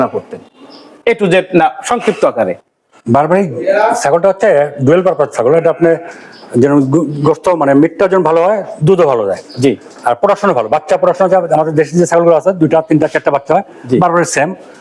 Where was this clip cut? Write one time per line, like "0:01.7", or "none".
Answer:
none